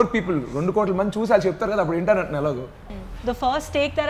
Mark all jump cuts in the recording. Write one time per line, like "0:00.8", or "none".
0:02.8